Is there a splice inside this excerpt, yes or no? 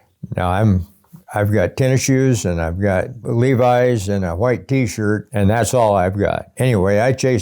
yes